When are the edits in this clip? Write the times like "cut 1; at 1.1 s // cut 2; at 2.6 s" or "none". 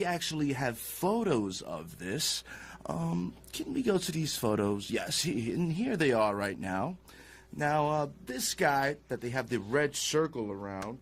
cut 1; at 7.5 s